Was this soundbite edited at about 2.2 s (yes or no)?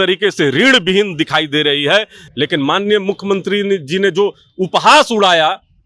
yes